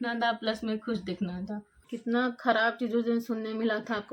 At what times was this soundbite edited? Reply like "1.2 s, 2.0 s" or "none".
1.9 s